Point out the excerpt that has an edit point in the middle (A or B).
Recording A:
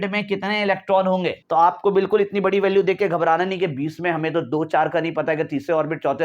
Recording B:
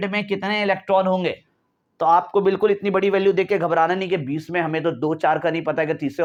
A